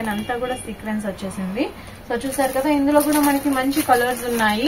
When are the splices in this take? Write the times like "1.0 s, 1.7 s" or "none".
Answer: none